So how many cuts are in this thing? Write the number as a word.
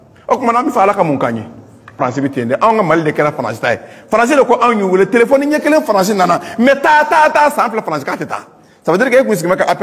one